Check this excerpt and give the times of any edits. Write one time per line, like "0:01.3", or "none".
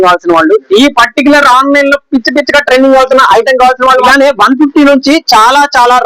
0:04.1